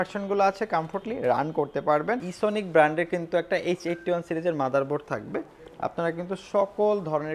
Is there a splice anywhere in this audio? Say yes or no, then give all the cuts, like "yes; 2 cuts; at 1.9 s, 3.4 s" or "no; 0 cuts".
yes; 1 cut; at 2.3 s